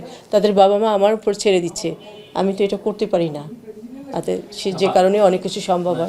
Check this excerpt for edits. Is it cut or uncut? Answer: uncut